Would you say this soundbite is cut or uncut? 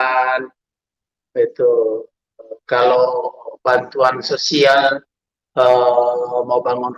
uncut